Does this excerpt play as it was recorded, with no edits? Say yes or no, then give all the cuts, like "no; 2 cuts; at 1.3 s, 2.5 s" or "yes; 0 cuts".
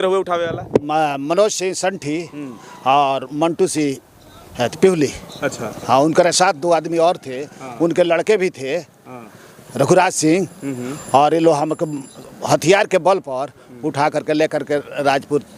yes; 0 cuts